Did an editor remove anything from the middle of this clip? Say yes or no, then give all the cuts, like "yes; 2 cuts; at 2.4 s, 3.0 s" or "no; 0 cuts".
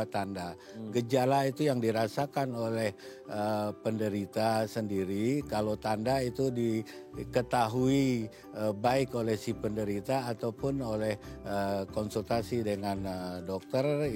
no; 0 cuts